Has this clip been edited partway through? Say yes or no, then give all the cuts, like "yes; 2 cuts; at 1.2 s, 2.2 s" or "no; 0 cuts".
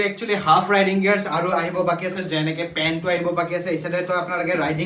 no; 0 cuts